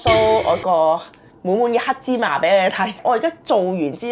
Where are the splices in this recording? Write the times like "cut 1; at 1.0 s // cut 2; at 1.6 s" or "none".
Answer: cut 1; at 3.0 s